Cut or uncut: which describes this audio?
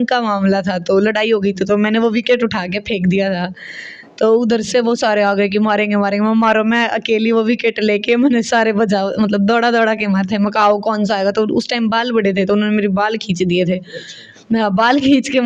uncut